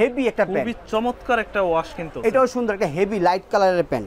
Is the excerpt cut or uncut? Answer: cut